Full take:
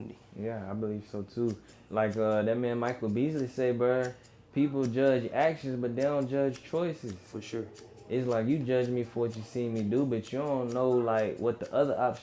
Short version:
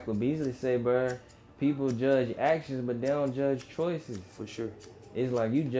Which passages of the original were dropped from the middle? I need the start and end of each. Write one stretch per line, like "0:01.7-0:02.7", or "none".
none